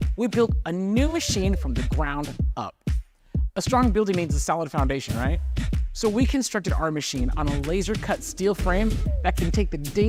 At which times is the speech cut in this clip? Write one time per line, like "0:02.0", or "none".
none